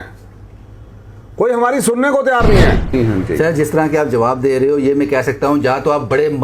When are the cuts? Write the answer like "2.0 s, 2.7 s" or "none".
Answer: 2.9 s